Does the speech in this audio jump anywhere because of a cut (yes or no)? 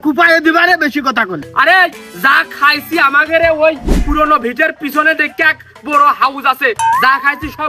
yes